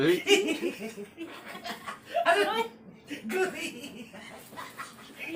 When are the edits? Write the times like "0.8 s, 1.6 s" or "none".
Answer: none